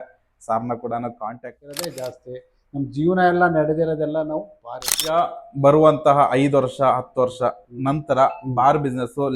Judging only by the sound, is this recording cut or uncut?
cut